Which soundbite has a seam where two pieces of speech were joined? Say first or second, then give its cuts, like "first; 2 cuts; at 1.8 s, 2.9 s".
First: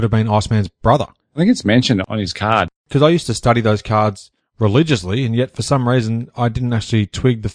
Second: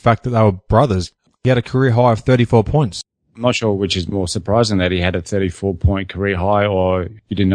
second; 2 cuts; at 1.4 s, 3.0 s